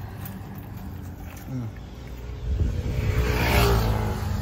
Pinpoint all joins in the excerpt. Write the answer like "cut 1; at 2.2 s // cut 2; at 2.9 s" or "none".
none